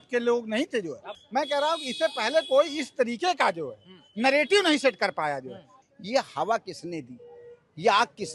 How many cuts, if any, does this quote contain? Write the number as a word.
two